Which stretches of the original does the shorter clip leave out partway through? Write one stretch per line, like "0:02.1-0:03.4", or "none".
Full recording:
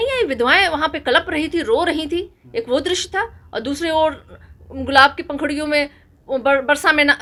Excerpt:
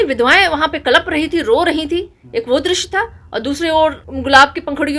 0:04.3-0:04.7